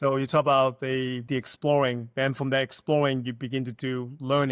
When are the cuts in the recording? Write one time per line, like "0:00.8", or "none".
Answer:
0:01.3